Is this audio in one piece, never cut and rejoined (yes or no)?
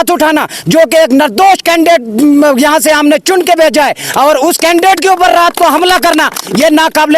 yes